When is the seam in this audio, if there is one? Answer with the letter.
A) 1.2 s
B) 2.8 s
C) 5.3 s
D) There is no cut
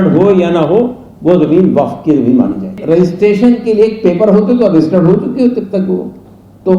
B